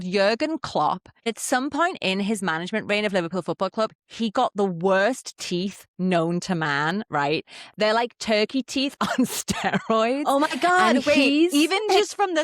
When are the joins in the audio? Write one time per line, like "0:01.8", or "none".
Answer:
0:01.2